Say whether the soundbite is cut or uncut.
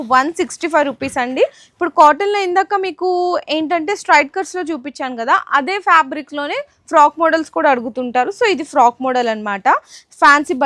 uncut